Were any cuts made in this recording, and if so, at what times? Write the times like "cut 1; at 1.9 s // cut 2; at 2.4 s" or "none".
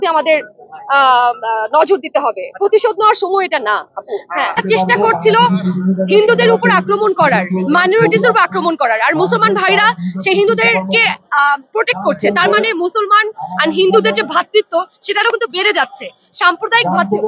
cut 1; at 4.6 s